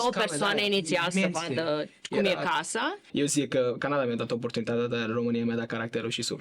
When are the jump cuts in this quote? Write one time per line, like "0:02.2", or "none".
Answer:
0:03.0

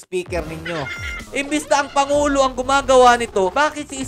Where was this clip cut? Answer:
0:01.3

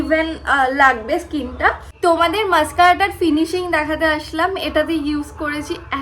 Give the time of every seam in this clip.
0:02.0

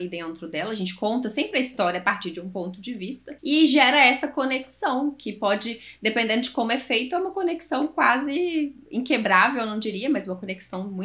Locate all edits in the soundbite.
0:03.3

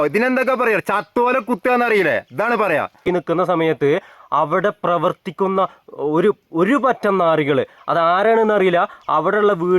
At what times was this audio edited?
0:03.1

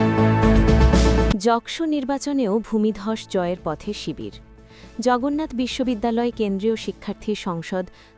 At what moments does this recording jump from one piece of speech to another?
0:01.3

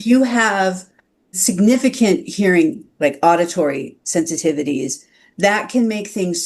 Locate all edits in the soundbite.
0:01.3

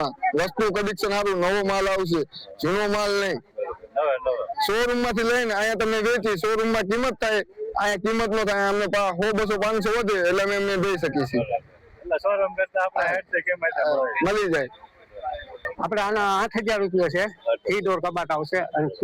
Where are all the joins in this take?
0:15.6

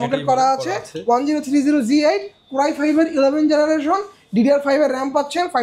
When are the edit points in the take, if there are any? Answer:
none

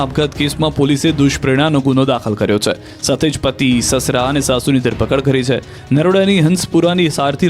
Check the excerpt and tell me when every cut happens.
0:04.4

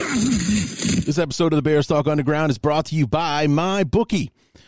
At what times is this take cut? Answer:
0:01.0

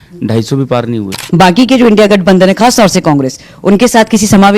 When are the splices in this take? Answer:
0:01.2

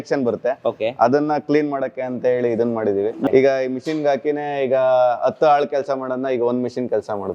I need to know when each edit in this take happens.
0:03.3

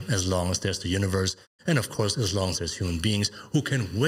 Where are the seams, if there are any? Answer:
none

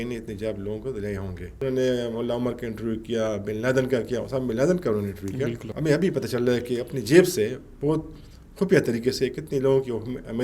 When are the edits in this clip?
0:01.5
0:05.7

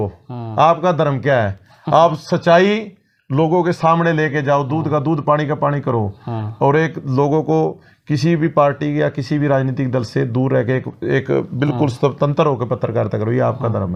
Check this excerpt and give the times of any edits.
none

